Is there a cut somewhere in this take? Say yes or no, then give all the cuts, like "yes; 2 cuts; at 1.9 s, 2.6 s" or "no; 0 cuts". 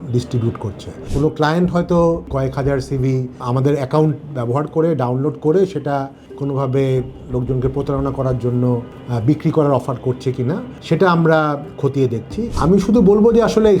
yes; 3 cuts; at 1.0 s, 2.3 s, 12.5 s